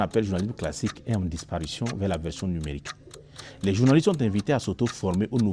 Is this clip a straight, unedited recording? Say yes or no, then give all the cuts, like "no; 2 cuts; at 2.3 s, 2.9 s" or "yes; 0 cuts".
yes; 0 cuts